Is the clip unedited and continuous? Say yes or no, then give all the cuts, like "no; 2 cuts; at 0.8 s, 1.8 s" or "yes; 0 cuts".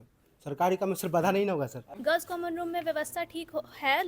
no; 1 cut; at 1.9 s